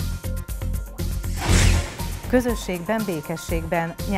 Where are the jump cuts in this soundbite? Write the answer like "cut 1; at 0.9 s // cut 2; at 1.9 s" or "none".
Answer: cut 1; at 2.2 s